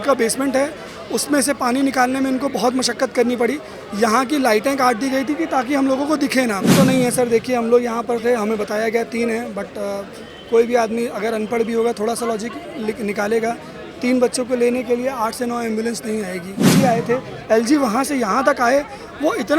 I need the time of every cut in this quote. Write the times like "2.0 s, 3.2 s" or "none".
6.7 s, 16.7 s